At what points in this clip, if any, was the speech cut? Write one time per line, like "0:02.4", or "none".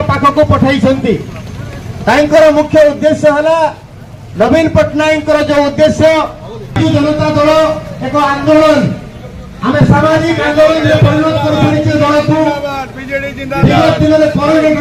none